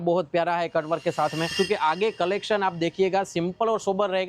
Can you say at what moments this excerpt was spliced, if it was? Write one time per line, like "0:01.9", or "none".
0:01.5